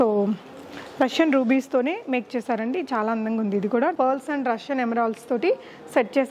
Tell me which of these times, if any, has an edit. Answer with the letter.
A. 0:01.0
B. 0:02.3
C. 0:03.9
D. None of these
C